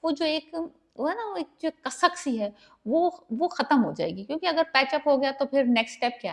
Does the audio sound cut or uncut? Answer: uncut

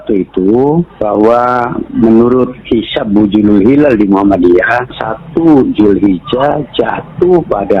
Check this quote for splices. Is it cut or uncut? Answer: uncut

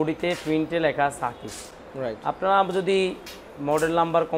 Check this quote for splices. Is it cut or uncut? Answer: uncut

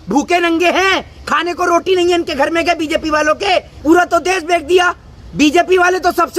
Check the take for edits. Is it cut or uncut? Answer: cut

